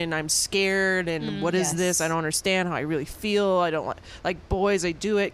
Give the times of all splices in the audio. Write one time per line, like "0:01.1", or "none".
none